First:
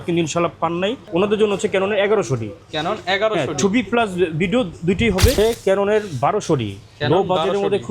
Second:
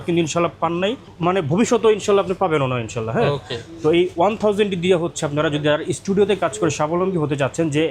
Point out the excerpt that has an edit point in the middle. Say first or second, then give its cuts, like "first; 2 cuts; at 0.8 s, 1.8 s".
first; 2 cuts; at 1.0 s, 5.4 s